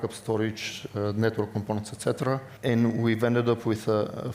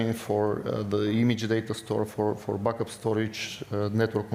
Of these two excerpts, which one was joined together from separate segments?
first; 1 cut; at 2.5 s

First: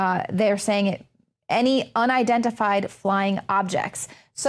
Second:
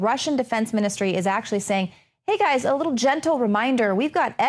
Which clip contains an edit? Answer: first; 1 cut; at 1.5 s

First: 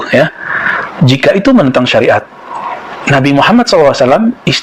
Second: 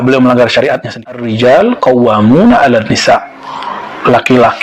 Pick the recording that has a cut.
second; 1 cut; at 1.3 s

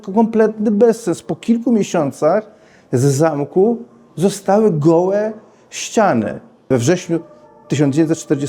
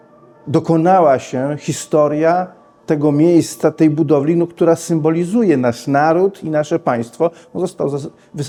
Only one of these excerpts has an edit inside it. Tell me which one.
first; 1 cut; at 6.7 s

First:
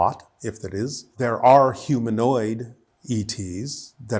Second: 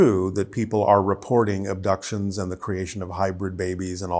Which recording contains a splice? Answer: first; 1 cut; at 1.1 s

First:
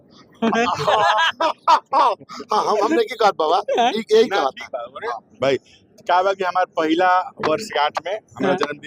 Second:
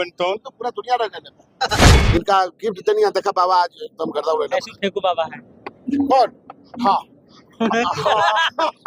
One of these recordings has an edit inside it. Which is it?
second; 1 cut; at 1.9 s

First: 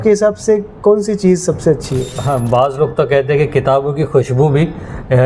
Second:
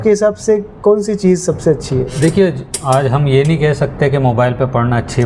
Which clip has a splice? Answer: first; 1 cut; at 2.1 s

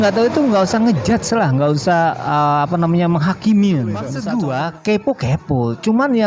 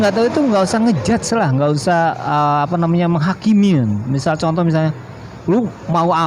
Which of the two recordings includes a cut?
first; 1 cut; at 4.1 s

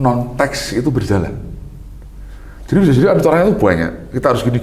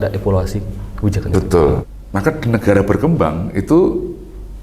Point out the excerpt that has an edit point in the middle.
second; 1 cut; at 1.9 s

